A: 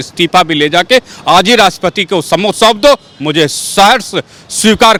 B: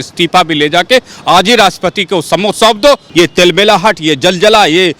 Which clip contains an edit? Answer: B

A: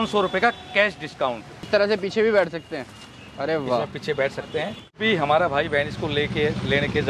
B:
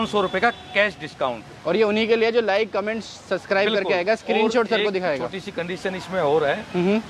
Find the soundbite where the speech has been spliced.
A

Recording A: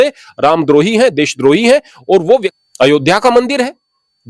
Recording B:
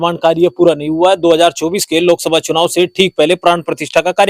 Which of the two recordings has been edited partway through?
A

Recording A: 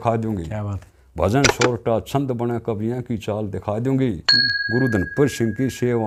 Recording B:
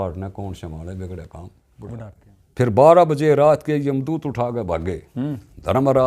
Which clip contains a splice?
B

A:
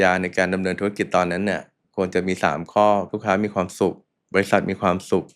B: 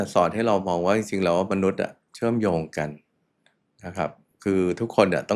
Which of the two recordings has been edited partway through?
A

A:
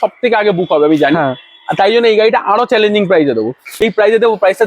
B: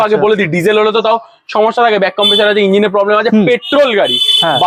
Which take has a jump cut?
A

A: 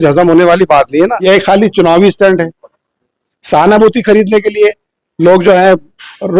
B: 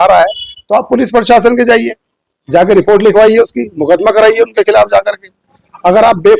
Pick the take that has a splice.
A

